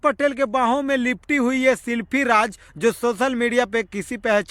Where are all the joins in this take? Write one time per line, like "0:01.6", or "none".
none